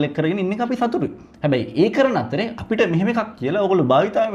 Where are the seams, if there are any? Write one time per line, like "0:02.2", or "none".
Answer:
none